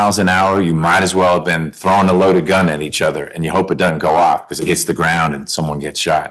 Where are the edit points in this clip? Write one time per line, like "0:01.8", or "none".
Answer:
none

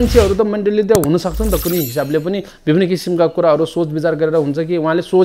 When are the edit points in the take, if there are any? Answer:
none

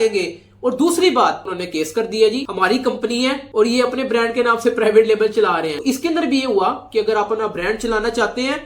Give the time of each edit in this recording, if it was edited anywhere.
0:01.5
0:05.8

